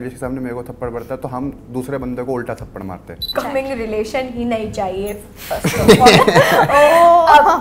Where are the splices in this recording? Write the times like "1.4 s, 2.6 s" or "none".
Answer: 3.3 s